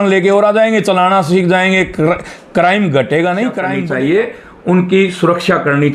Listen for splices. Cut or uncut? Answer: cut